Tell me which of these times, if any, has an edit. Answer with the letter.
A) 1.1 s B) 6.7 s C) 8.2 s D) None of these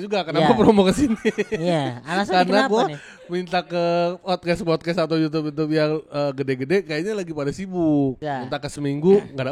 C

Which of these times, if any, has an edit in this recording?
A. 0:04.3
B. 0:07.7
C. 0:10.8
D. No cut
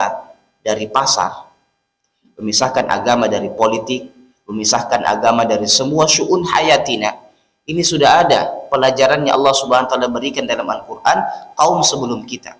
D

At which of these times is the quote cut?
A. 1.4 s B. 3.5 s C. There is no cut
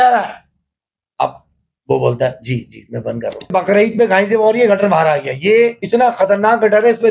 B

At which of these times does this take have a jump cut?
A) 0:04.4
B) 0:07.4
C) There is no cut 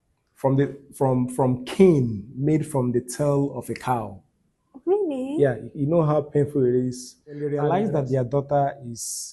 B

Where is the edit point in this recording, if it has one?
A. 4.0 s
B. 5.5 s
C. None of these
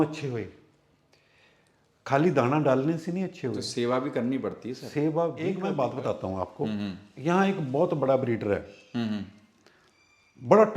B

